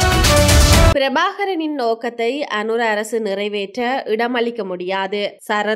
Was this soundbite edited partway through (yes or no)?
yes